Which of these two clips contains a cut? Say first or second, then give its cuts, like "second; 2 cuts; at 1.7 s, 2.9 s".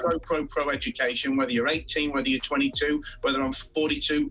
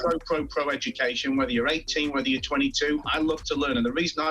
second; 1 cut; at 3.1 s